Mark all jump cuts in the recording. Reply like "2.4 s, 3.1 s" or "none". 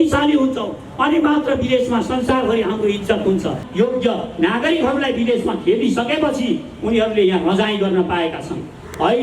3.6 s